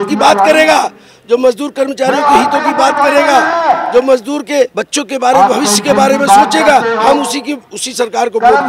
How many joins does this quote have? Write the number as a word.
one